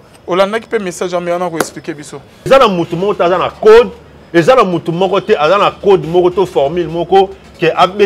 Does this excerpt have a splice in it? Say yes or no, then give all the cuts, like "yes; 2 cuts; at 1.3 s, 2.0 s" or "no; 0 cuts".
yes; 1 cut; at 2.5 s